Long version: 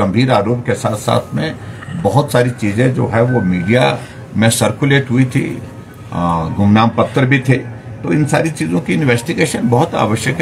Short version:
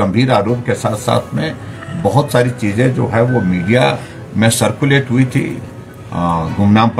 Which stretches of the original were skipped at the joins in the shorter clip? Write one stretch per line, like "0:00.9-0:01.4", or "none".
none